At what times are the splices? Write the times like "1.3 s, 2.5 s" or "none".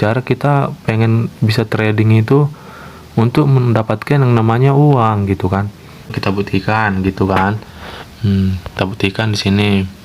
6.1 s

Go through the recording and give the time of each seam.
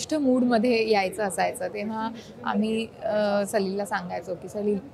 none

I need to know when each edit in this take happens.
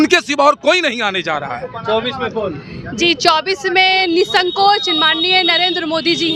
none

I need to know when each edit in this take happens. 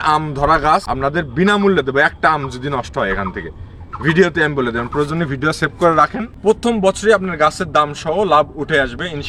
0.9 s, 6.3 s

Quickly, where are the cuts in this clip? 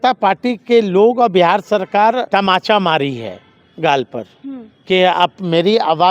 2.3 s

